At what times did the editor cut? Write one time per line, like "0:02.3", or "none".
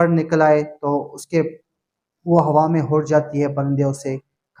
none